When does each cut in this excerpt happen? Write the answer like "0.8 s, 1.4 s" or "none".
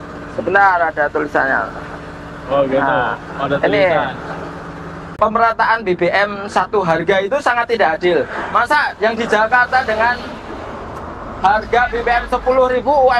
5.1 s